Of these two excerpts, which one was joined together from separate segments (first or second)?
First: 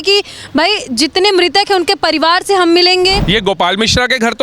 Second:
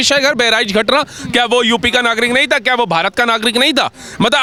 first